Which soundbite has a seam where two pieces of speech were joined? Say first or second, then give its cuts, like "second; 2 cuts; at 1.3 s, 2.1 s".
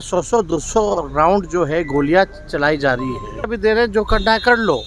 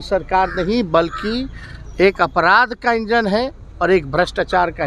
first; 1 cut; at 3.5 s